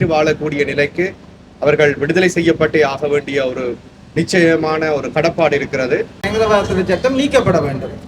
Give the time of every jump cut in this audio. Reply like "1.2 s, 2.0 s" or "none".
6.2 s